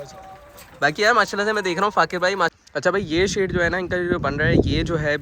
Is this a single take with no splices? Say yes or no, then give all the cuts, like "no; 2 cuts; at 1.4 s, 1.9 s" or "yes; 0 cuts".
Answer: no; 1 cut; at 2.5 s